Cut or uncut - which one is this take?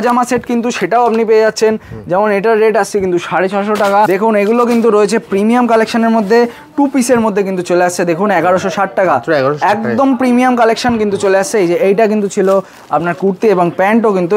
cut